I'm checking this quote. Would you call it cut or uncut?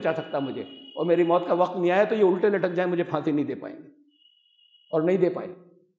uncut